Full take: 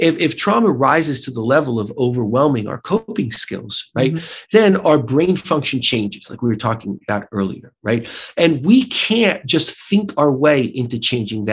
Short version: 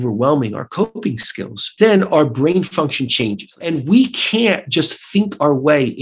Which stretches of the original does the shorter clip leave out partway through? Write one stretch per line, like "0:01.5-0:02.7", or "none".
0:03.7-0:04.3
0:06.4-0:08.5